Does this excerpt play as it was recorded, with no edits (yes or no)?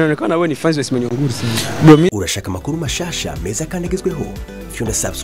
no